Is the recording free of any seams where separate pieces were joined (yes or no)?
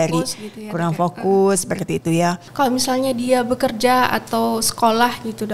no